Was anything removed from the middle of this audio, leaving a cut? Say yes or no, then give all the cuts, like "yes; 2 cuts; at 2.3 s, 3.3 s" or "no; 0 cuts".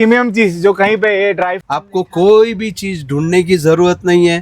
yes; 1 cut; at 1.6 s